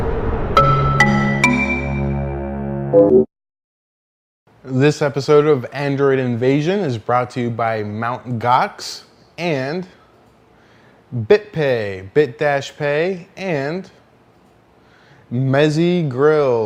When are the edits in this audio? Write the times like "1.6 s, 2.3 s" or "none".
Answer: none